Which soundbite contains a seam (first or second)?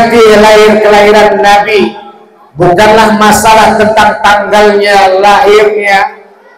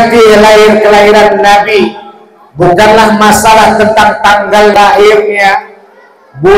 second